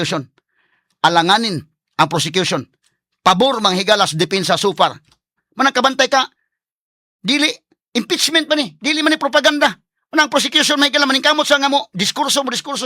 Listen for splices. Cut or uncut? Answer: cut